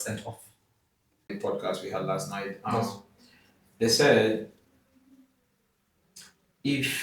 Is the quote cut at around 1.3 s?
yes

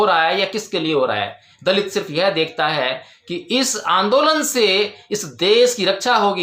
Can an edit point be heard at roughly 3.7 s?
no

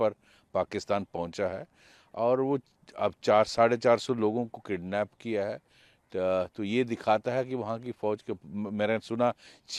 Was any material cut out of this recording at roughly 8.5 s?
no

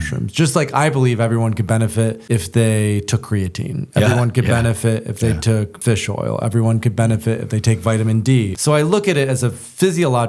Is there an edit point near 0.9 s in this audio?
no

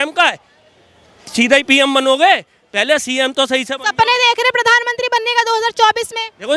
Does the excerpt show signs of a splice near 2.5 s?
no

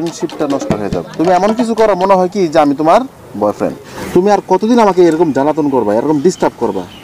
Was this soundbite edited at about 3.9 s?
yes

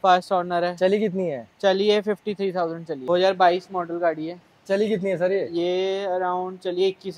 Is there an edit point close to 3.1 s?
yes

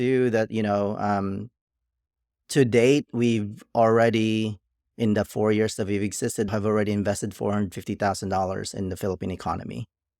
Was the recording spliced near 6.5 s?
yes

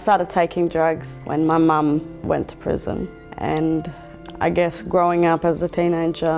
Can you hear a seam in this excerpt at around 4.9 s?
no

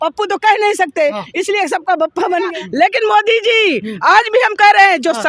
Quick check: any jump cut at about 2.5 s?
yes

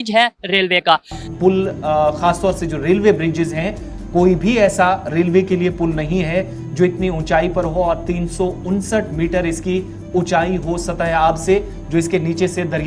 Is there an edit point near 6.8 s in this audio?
no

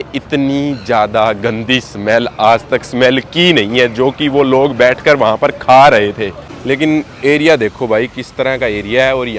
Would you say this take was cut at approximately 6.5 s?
yes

